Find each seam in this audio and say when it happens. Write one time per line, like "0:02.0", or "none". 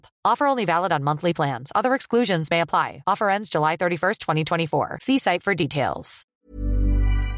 0:06.5

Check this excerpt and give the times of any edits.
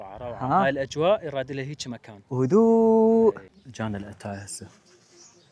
0:03.6

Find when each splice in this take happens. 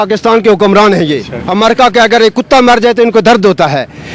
0:01.3

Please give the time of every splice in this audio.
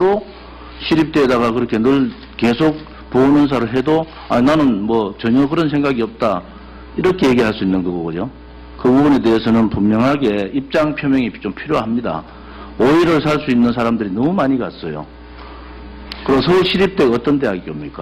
none

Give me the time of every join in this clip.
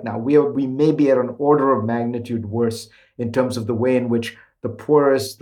none

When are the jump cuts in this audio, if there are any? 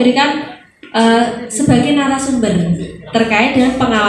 none

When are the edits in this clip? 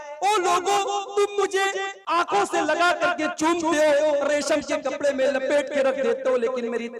0:01.9

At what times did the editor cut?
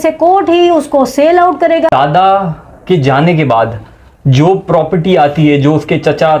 0:01.6

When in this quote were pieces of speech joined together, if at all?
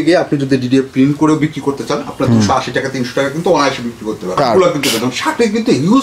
0:04.3

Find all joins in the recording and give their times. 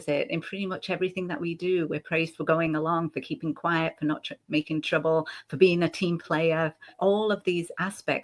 0:06.9

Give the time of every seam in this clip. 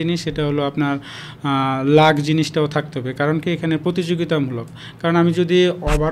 none

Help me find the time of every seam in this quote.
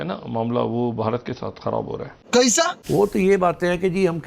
0:02.2

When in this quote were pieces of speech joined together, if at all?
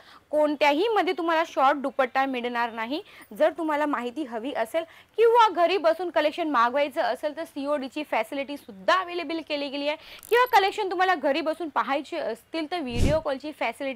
none

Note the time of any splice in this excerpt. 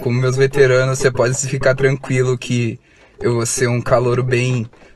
none

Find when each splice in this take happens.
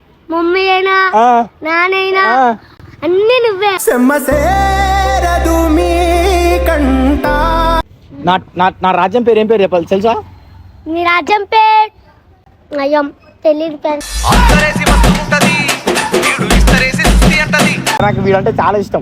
0:07.9
0:14.1
0:18.0

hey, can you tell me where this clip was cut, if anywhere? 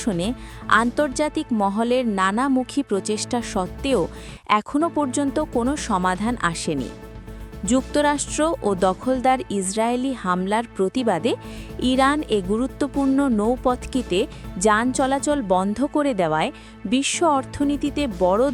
none

